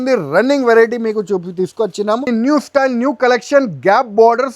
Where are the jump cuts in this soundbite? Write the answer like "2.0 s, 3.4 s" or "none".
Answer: 2.3 s